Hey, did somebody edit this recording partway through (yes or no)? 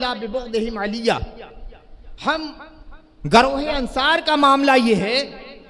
no